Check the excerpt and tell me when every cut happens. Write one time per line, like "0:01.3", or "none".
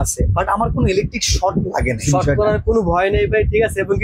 0:02.0